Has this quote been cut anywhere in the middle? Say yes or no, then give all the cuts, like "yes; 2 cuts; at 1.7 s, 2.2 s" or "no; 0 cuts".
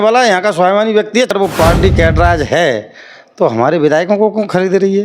yes; 1 cut; at 1.3 s